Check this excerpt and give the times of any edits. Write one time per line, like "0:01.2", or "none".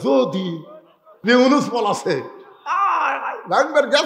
0:01.1